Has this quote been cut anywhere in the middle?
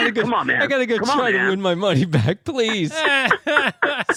no; 0 cuts

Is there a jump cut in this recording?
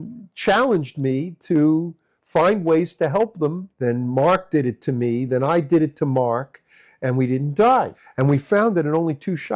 yes; 2 cuts; at 3.7 s, 8.0 s

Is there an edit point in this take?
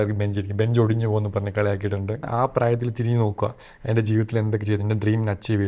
yes; 1 cut; at 2.3 s

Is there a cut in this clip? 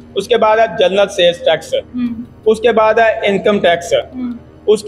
no; 0 cuts

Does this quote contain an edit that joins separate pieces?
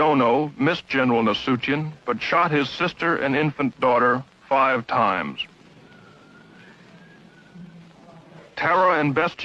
yes; 1 cut; at 8.4 s

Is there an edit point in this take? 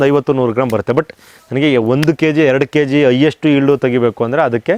no; 0 cuts

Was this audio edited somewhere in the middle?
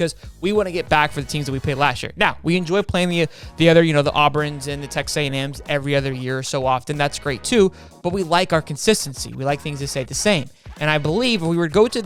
no; 0 cuts

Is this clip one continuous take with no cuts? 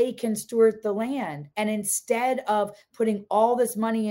yes; 0 cuts

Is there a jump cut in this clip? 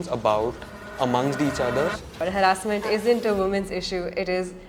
yes; 1 cut; at 2.2 s

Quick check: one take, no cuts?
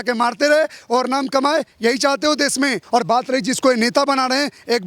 no; 1 cut; at 2.8 s

